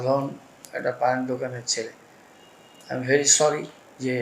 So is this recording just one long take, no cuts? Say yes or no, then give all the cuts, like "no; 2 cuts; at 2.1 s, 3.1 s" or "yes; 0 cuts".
yes; 0 cuts